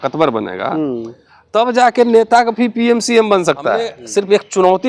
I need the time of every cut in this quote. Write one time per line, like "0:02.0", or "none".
0:04.0